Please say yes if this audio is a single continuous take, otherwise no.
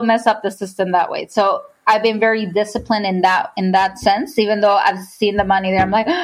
yes